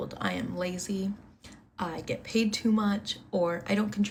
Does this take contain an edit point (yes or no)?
no